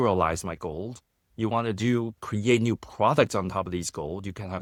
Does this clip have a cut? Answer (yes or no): no